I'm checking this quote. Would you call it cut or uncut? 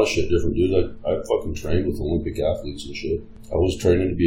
cut